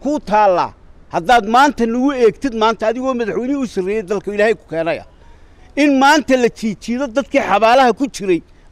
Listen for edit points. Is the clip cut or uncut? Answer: uncut